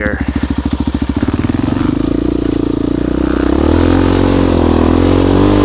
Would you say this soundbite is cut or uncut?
cut